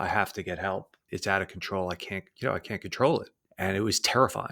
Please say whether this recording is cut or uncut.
cut